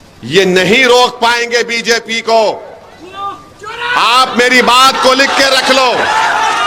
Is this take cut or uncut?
uncut